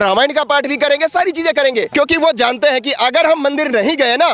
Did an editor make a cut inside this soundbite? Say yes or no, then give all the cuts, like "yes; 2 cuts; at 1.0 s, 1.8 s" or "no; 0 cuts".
yes; 1 cut; at 1.9 s